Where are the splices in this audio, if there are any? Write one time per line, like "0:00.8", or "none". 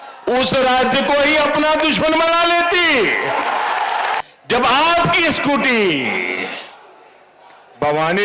0:04.2